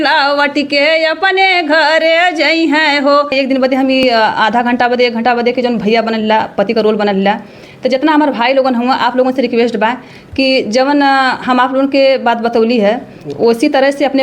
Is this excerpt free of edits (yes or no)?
no